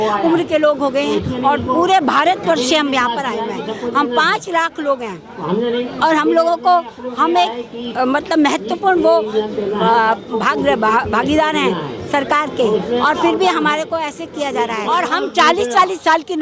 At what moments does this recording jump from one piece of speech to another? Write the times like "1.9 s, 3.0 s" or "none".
14.8 s